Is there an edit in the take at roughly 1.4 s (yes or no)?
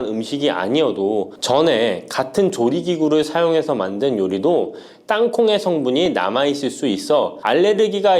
no